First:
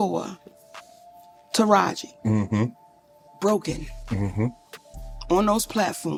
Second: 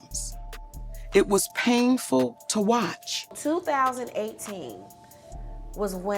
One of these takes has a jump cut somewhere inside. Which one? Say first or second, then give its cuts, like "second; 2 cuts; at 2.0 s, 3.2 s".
second; 1 cut; at 3.1 s